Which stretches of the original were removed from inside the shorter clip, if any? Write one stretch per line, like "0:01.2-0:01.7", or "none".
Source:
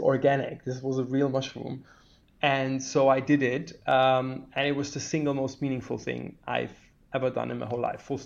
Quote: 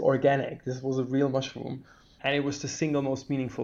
0:02.1-0:04.4

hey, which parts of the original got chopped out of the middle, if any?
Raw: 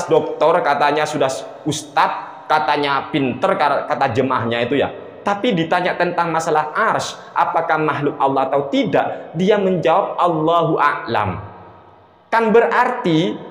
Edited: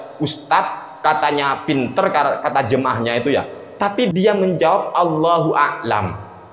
0:05.6-0:09.3

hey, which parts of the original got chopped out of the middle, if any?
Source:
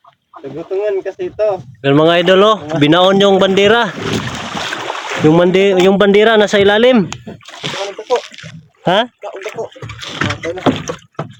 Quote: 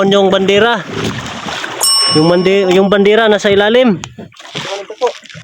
none

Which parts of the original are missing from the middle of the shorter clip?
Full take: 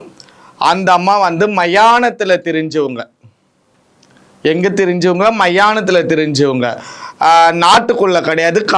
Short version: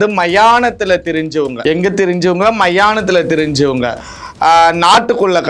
0:03.0-0:04.4

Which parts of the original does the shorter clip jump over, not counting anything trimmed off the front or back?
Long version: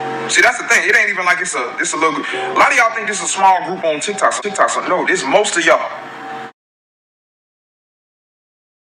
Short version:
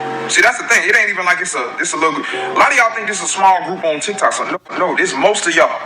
0:04.6-0:04.7

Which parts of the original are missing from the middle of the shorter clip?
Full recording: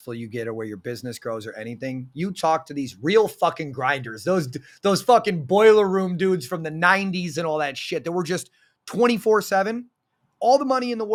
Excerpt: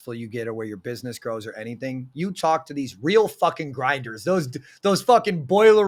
none

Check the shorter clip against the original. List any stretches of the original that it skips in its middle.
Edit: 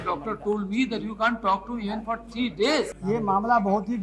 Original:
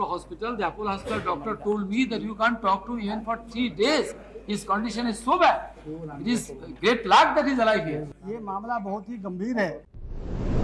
0:04.2-0:08.2

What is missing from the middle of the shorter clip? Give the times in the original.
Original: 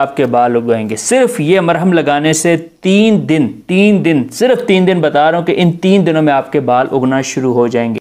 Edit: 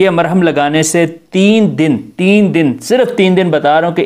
none

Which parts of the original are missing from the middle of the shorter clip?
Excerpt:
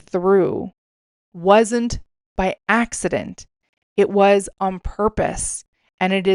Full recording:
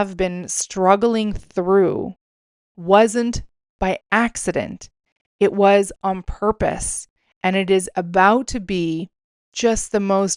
none

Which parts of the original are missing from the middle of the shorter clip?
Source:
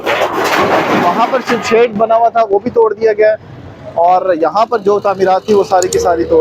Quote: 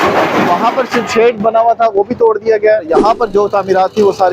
0:03.4-0:04.4

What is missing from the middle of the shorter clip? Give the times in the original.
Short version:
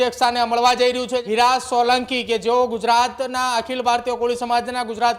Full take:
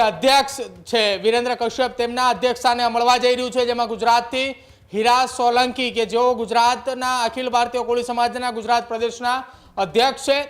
0:03.7-0:04.9

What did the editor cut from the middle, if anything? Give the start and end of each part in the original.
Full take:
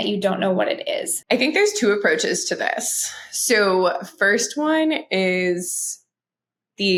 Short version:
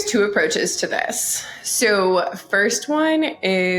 none

